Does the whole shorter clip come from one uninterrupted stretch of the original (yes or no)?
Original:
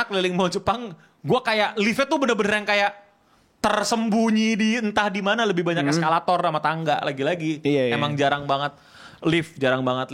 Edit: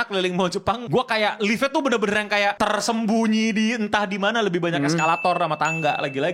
no